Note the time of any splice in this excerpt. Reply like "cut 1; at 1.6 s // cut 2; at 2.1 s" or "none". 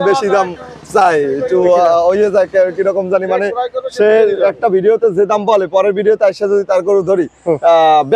none